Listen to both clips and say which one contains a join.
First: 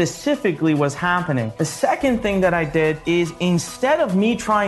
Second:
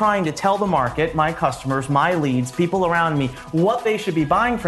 first; 2 cuts; at 1.6 s, 3.0 s

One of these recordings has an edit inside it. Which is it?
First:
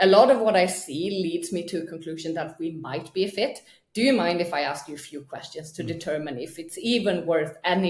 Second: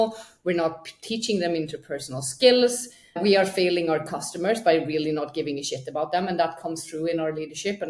second; 1 cut; at 3.2 s

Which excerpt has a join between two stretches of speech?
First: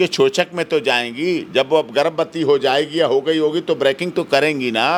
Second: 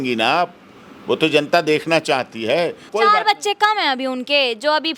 second; 1 cut; at 2.9 s

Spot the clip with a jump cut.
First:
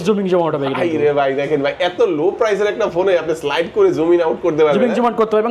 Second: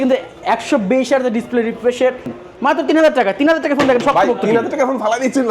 second; 1 cut; at 2.4 s

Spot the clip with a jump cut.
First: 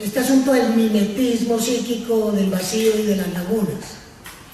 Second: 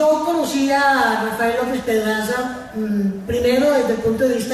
first; 1 cut; at 1.4 s

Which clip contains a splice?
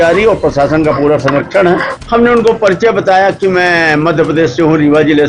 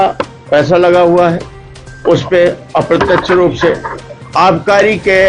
first; 1 cut; at 1.9 s

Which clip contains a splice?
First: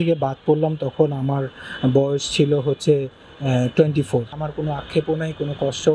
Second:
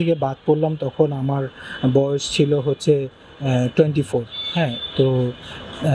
first; 1 cut; at 4.4 s

